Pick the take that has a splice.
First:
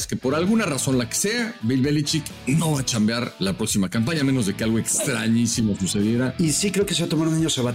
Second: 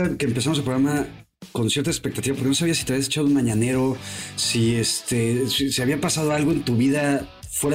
first; 3 cuts; at 2.3 s, 3.3 s, 6.3 s

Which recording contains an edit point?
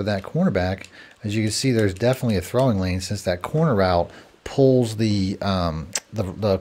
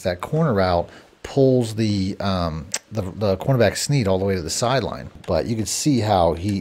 second; 1 cut; at 5.1 s

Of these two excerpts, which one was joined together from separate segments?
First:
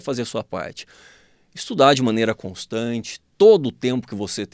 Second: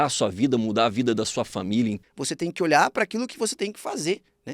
second; 1 cut; at 2.0 s

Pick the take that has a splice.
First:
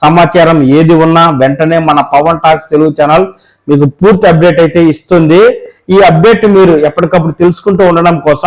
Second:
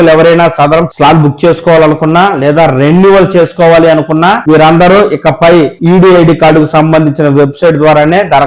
second; 3 cuts; at 0.9 s, 4.4 s, 5.8 s

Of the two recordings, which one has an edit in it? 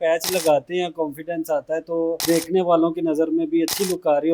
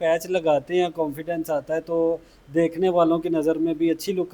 first; 1 cut; at 2.2 s

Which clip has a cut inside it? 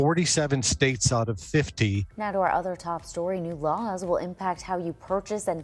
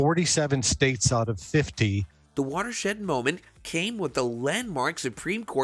first; 1 cut; at 2.1 s

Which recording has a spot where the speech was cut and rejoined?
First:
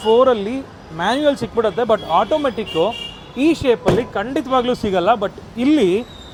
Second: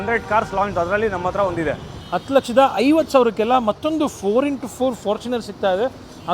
second; 1 cut; at 1.9 s

